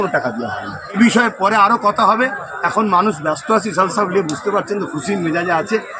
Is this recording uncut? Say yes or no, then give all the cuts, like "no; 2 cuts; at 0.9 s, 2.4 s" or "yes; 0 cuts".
no; 1 cut; at 1.0 s